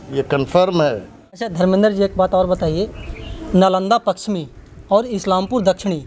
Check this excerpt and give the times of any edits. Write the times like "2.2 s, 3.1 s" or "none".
1.5 s